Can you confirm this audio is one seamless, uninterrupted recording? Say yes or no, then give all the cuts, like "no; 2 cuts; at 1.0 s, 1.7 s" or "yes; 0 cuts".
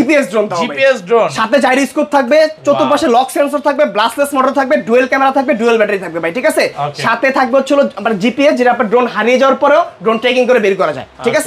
yes; 0 cuts